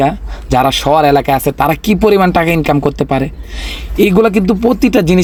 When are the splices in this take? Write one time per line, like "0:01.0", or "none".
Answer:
none